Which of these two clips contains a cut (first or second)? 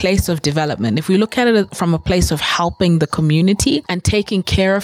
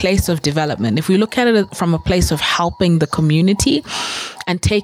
first